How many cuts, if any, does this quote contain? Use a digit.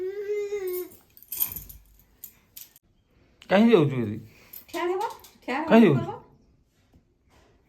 1